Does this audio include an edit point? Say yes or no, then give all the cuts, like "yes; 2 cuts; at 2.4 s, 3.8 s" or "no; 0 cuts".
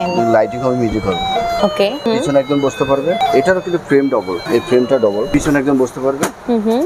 yes; 4 cuts; at 2.1 s, 3.2 s, 4.4 s, 5.3 s